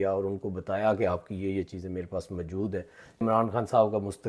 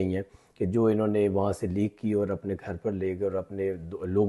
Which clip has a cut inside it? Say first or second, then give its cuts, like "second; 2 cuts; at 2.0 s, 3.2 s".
first; 1 cut; at 3.2 s